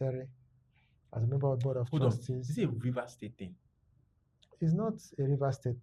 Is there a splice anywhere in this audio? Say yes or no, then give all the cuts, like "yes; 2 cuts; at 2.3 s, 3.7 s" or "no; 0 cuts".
no; 0 cuts